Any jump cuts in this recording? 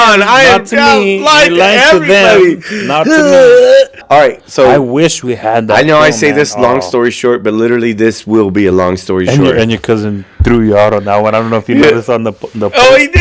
yes; 1 cut; at 4.0 s

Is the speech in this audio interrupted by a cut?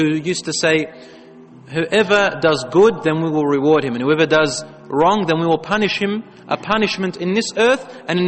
no; 0 cuts

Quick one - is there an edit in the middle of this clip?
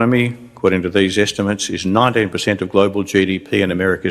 yes; 1 cut; at 2.5 s

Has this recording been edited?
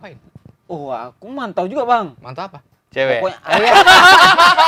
no; 0 cuts

